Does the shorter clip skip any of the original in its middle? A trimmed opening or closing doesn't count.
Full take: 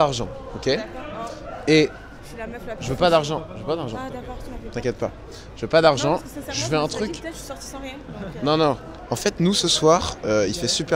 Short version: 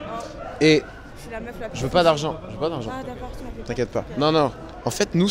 yes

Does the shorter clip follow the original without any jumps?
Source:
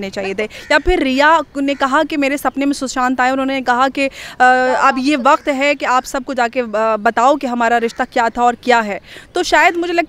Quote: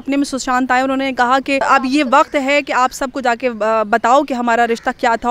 no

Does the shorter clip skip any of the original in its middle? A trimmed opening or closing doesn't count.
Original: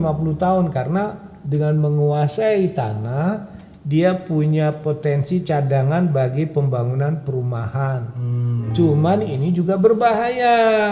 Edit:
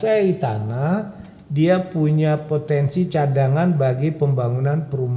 no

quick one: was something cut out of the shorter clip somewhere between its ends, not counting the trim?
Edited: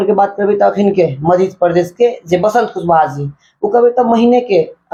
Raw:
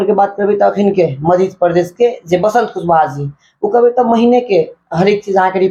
no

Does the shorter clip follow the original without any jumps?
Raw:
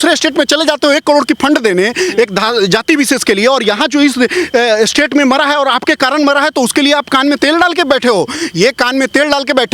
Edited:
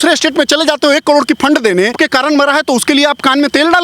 no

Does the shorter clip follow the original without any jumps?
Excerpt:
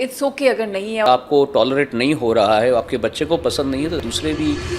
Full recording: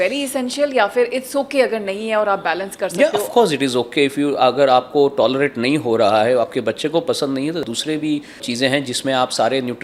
no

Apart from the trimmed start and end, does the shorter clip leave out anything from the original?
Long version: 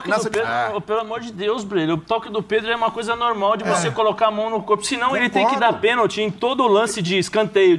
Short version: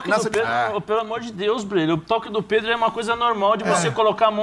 no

